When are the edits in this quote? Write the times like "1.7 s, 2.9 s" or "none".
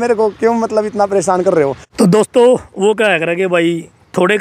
1.8 s